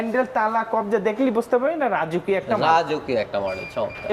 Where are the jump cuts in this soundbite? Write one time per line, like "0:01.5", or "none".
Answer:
none